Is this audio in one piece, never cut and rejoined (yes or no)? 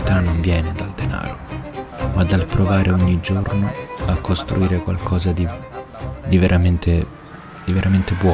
yes